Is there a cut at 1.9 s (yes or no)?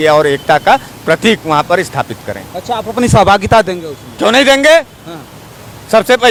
no